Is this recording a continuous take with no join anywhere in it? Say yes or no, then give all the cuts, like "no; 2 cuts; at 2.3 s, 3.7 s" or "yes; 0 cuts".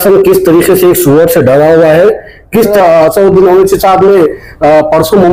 no; 1 cut; at 2.7 s